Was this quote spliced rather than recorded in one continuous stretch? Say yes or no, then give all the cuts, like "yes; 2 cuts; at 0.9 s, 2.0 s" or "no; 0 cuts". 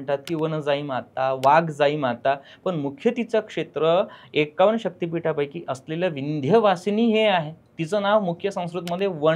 no; 0 cuts